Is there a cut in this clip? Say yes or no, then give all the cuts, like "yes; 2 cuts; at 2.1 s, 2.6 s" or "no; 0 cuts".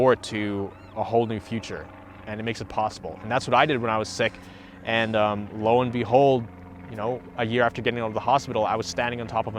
no; 0 cuts